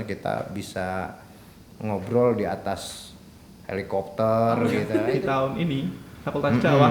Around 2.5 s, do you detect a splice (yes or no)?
no